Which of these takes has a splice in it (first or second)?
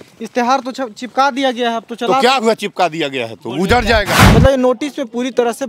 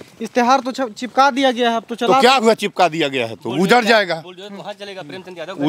first